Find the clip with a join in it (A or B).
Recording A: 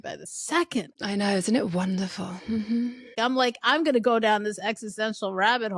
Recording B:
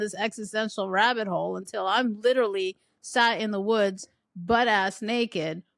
A